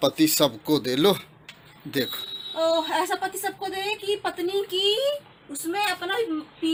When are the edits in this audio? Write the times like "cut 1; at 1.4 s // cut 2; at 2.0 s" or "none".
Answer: none